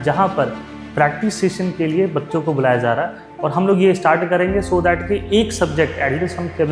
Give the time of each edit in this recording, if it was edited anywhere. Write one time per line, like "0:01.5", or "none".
0:03.2